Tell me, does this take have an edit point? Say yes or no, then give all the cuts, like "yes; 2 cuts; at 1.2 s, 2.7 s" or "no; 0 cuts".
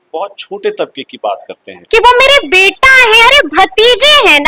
yes; 1 cut; at 1.8 s